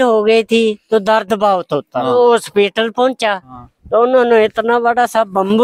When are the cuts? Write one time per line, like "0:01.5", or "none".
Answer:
0:02.1